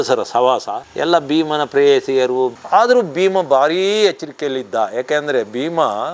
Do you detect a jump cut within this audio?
yes; 1 cut; at 2.6 s

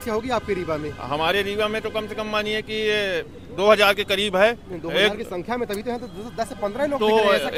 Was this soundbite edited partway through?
no; 0 cuts

